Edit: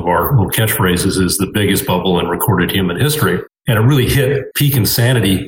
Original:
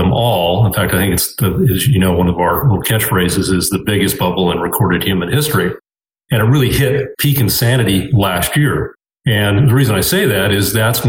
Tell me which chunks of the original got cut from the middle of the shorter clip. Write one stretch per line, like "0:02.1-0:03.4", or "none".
0:05.9-0:06.2